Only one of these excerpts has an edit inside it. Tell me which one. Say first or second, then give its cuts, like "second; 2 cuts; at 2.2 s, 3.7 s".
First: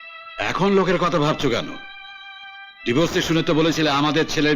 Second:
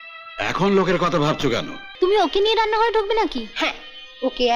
second; 1 cut; at 1.8 s